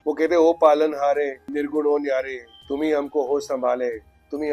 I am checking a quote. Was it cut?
no; 0 cuts

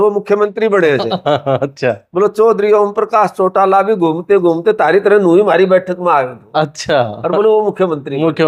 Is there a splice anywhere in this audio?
no; 0 cuts

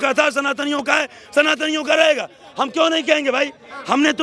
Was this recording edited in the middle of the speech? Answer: no; 0 cuts

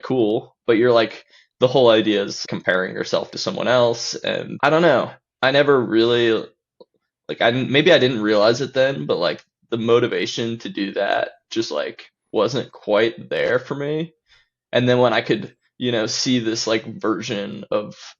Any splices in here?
yes; 2 cuts; at 2.4 s, 4.5 s

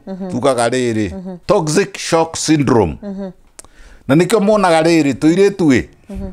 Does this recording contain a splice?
yes; 1 cut; at 1.3 s

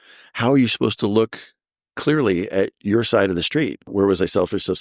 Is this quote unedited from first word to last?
no; 1 cut; at 3.9 s

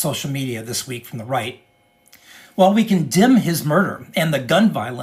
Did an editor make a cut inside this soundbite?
no; 0 cuts

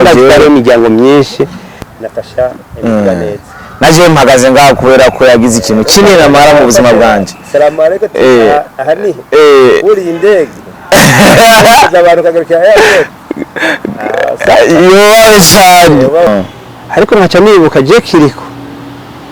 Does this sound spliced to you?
yes; 1 cut; at 16.3 s

